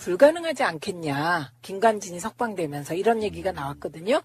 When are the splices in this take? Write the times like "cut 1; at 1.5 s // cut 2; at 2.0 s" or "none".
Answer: none

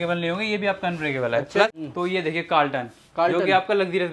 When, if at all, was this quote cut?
cut 1; at 1.8 s

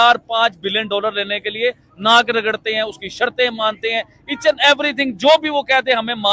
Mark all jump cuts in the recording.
none

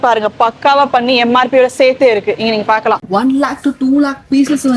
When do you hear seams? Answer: cut 1; at 3.0 s

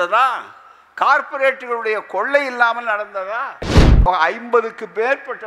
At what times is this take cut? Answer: cut 1; at 4.1 s

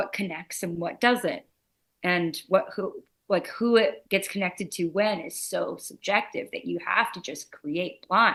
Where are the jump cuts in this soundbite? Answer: none

